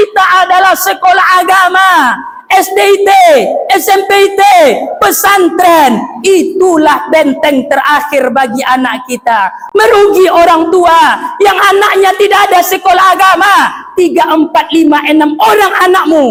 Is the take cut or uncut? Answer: uncut